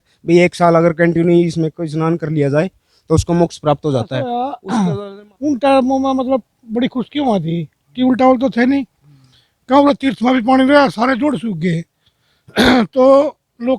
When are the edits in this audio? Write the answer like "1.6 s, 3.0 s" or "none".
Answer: 4.3 s